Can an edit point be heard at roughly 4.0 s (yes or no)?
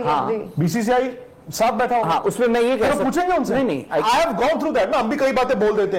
yes